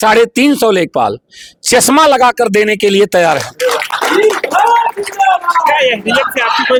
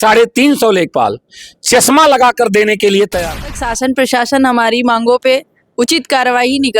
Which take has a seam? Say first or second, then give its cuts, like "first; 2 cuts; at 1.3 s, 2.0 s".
second; 1 cut; at 3.6 s